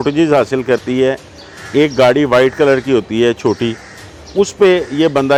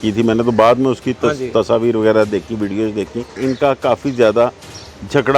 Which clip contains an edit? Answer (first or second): second